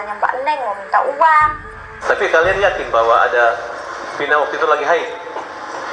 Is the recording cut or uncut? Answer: cut